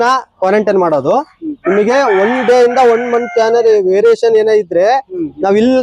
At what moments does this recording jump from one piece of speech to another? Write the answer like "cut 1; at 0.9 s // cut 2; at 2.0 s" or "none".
none